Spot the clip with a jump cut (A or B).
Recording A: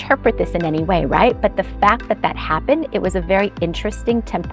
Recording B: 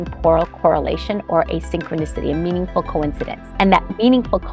B